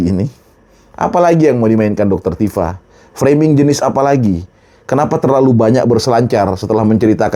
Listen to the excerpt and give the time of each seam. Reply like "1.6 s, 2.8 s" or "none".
none